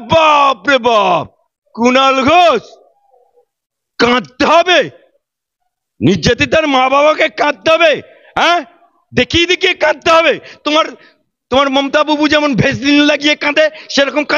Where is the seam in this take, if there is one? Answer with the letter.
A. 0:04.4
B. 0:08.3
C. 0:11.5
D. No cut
D